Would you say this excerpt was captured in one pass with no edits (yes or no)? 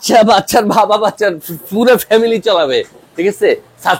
yes